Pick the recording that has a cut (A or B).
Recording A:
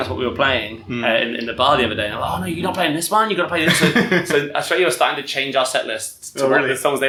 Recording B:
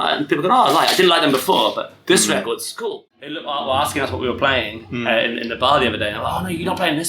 B